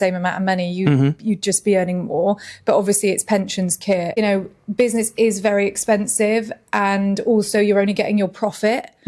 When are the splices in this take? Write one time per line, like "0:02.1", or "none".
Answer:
0:04.2